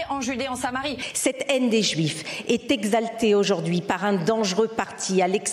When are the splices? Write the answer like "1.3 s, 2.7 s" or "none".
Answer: 0.9 s